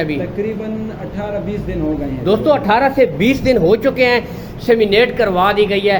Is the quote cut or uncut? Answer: uncut